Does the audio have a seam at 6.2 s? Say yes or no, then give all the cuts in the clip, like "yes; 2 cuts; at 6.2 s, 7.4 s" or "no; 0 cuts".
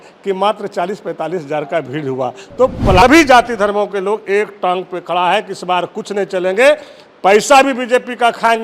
no; 1 cut; at 3.0 s